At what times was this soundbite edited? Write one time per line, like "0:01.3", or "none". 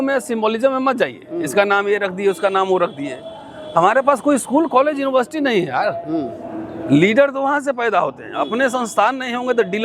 none